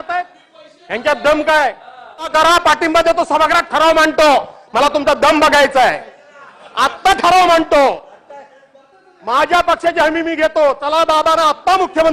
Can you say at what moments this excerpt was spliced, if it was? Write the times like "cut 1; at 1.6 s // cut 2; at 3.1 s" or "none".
cut 1; at 2.3 s